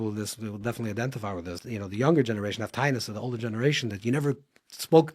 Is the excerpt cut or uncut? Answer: cut